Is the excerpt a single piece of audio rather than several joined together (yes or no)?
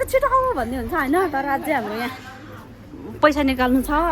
yes